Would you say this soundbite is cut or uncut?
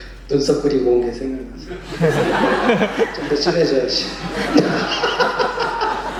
uncut